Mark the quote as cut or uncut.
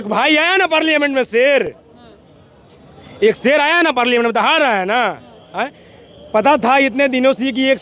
uncut